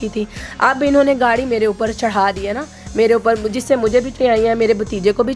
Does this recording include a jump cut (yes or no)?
yes